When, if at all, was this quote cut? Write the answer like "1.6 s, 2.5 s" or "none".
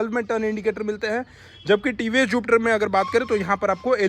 none